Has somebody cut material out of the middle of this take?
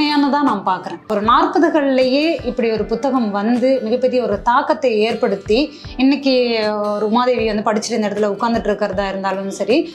yes; 1 cut; at 1.1 s

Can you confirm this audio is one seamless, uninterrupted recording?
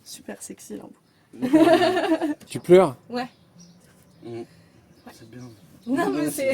no; 1 cut; at 2.4 s

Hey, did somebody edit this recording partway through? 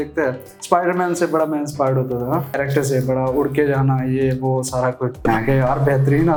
no; 0 cuts

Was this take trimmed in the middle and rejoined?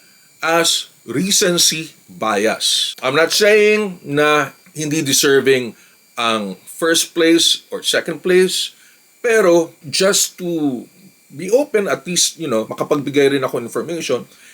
no; 0 cuts

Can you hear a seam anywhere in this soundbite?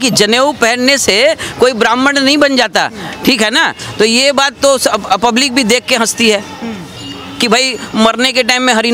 no; 0 cuts

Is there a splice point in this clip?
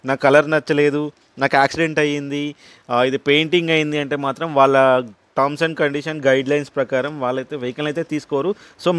no; 0 cuts

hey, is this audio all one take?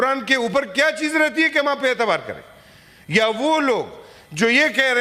yes; 0 cuts

